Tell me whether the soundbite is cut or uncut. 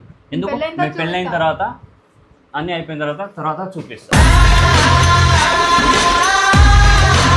uncut